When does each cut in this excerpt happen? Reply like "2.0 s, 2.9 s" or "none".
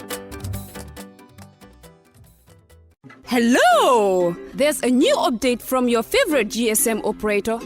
2.9 s